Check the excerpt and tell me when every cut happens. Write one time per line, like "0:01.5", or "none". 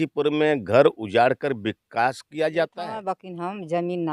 0:02.9